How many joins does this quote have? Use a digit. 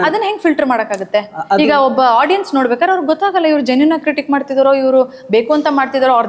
0